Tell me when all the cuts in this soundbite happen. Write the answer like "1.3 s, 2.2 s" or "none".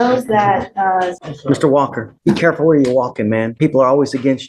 1.2 s, 2.1 s, 3.5 s